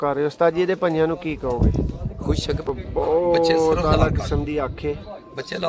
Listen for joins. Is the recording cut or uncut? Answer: cut